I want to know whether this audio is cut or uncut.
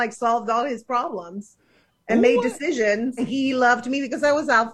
cut